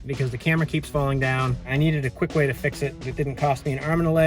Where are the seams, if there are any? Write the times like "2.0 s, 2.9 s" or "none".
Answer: 1.7 s